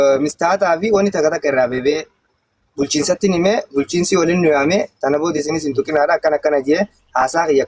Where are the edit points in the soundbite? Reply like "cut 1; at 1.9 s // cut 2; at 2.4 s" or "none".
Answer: none